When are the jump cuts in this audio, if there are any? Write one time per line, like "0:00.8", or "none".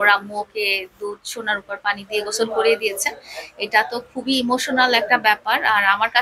none